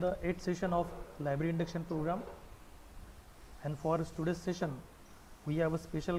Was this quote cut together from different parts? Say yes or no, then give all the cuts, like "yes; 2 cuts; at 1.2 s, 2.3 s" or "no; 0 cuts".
no; 0 cuts